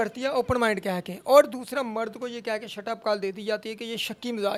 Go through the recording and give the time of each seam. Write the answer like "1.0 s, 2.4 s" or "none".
none